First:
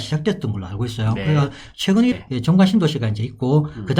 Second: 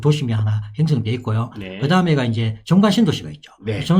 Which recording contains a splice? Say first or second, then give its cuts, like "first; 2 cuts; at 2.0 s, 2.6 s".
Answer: first; 1 cut; at 2.2 s